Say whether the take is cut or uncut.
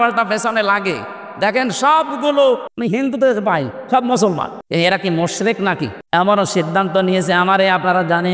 cut